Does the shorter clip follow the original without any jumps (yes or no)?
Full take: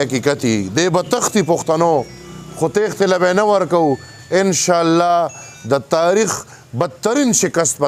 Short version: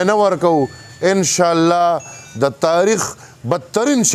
yes